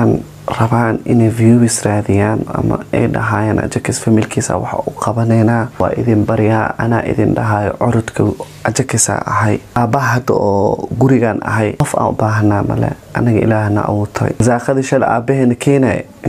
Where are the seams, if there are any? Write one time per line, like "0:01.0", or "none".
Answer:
0:05.7
0:09.8
0:11.8
0:14.4